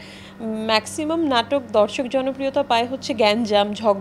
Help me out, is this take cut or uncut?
uncut